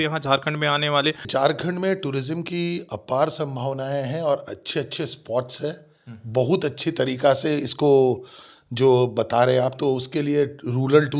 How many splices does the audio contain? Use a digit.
1